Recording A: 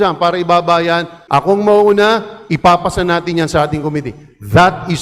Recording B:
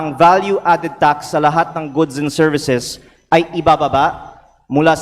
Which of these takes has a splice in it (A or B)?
A